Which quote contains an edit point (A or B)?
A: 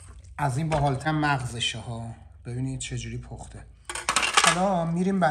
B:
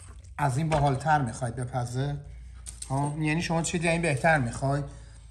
A